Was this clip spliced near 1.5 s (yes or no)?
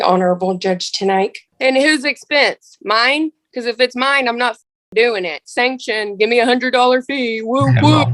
yes